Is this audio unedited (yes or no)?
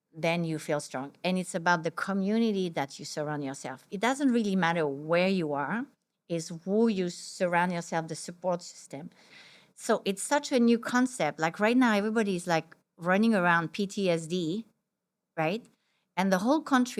no